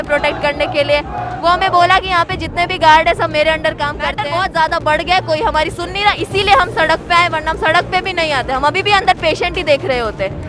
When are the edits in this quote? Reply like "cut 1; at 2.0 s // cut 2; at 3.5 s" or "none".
cut 1; at 4.2 s